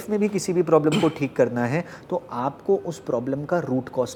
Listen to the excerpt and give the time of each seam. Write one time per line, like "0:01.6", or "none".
none